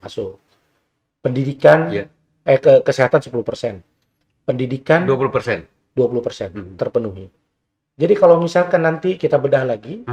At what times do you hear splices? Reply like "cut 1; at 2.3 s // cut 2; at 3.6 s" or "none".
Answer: none